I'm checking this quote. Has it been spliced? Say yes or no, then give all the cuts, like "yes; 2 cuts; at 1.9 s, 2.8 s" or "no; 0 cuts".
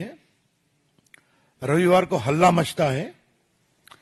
no; 0 cuts